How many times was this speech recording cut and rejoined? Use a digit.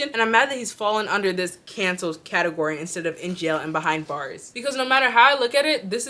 1